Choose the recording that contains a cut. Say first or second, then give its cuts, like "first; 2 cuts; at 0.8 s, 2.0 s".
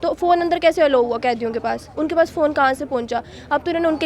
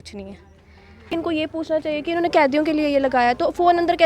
second; 1 cut; at 1.1 s